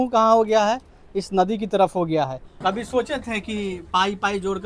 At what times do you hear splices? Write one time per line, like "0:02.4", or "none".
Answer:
0:02.4